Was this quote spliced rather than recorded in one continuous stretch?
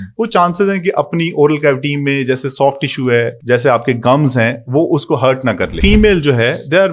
yes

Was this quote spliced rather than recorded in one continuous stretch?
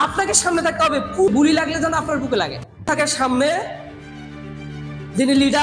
yes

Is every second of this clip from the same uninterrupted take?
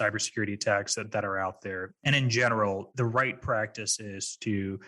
no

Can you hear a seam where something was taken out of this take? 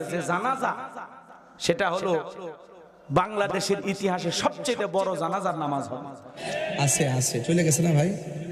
yes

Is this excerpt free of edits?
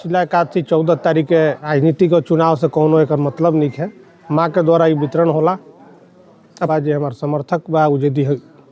no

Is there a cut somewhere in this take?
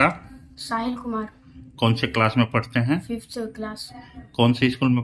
no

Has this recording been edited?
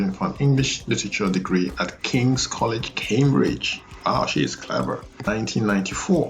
yes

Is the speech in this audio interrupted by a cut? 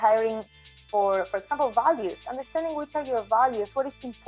no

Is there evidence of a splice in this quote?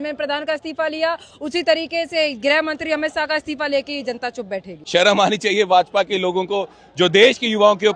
yes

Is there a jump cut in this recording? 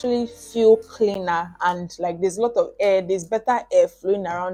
no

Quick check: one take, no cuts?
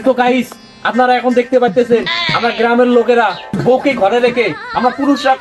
yes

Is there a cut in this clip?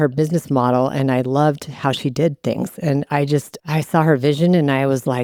no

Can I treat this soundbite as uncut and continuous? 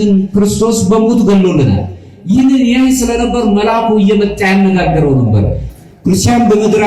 no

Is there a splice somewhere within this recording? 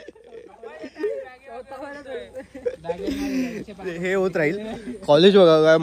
no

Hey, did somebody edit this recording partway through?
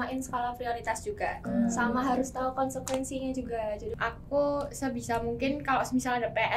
yes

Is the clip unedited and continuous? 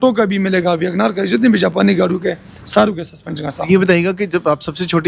yes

